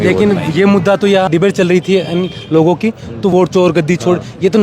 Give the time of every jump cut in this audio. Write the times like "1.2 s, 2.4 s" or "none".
1.3 s, 3.3 s